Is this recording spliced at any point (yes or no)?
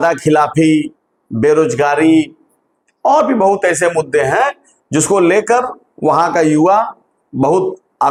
no